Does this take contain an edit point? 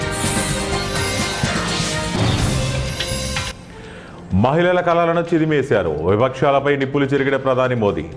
yes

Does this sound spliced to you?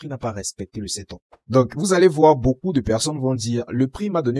yes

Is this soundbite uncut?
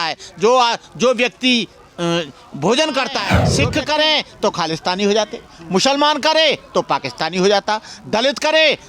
no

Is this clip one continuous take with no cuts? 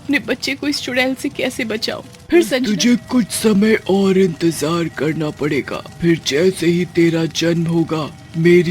no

